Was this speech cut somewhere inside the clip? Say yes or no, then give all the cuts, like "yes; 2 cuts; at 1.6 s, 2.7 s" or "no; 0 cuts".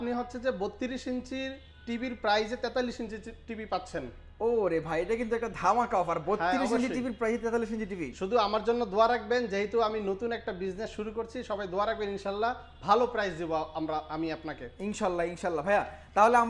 no; 0 cuts